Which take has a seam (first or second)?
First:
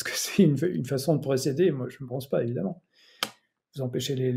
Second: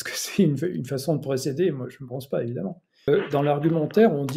second